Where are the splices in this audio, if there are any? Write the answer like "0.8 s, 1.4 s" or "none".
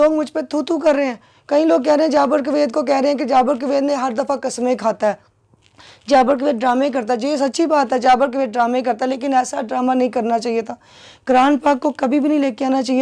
none